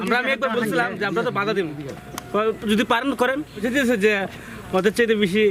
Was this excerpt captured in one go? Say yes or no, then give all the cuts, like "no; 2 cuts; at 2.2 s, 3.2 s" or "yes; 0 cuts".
no; 1 cut; at 3.6 s